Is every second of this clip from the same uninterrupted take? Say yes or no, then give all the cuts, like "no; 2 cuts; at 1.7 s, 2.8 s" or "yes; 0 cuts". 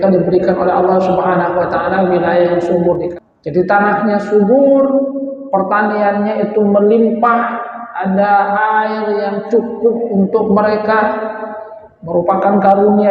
no; 1 cut; at 3.1 s